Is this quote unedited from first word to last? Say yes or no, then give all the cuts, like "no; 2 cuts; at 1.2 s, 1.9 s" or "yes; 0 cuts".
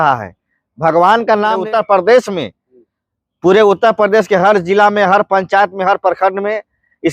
no; 1 cut; at 1.6 s